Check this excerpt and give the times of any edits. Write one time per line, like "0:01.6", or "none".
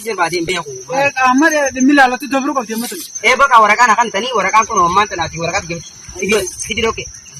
none